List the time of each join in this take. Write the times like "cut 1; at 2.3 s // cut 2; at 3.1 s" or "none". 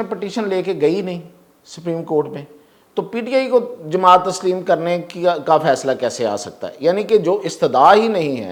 none